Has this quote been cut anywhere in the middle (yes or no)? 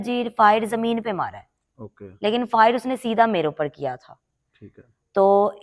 no